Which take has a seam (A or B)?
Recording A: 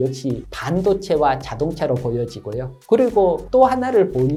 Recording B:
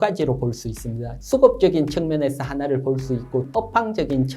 B